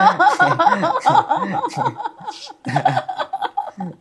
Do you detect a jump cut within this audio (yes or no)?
no